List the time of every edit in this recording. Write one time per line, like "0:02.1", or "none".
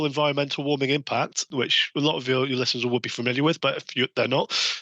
0:01.7

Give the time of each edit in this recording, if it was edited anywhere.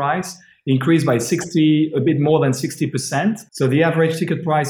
0:03.5

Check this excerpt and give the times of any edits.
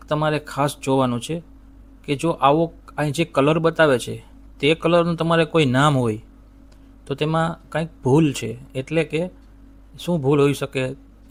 none

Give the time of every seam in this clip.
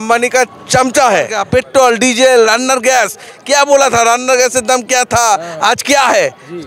0:01.4

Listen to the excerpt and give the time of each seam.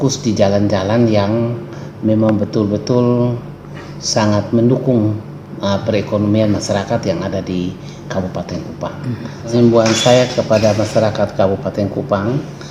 0:09.5

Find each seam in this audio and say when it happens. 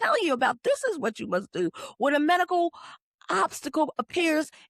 none

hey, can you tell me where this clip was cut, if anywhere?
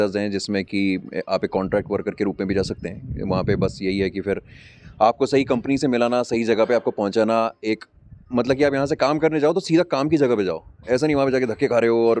none

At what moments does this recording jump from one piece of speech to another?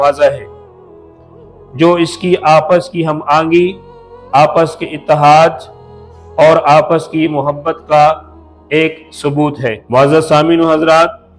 0:09.8

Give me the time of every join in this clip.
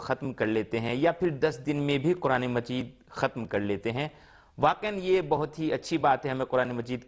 0:03.0

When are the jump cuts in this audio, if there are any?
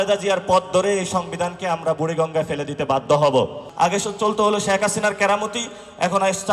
0:03.6

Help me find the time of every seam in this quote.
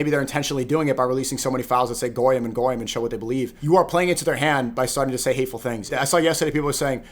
0:03.6
0:05.9

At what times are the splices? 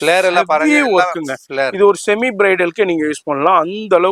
none

